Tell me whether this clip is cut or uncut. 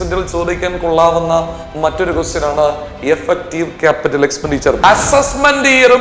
cut